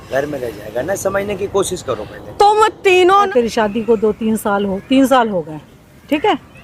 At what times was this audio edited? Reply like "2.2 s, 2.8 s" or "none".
3.3 s